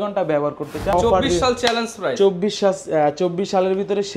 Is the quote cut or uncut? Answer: cut